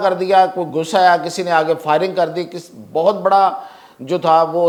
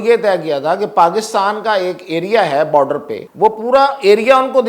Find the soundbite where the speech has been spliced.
second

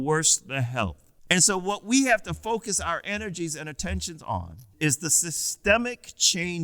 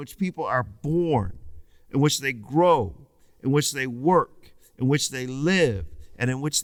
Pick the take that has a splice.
first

